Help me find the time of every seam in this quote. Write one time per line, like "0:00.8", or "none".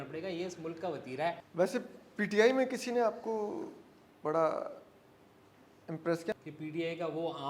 0:01.4
0:06.3